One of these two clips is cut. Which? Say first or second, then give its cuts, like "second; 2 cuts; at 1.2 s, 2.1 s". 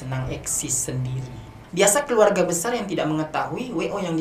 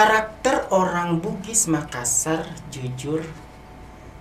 first; 1 cut; at 1.6 s